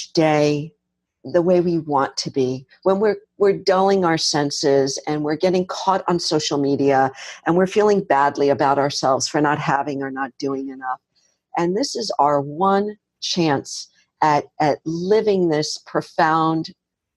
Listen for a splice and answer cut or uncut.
cut